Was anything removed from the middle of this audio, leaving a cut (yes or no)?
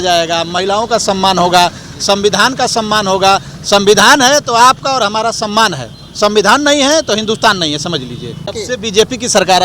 yes